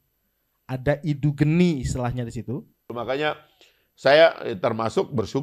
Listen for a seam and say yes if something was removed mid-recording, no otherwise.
yes